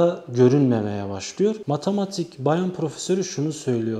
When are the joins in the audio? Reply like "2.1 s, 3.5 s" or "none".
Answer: none